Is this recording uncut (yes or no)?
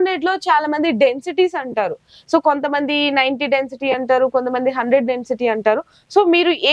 yes